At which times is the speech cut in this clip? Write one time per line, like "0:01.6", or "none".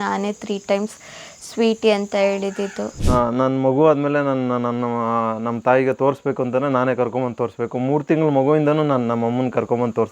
0:03.0